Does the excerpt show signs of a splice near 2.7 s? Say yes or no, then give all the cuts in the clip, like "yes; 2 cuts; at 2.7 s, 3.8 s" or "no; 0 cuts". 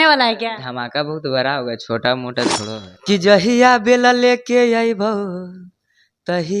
yes; 1 cut; at 2.7 s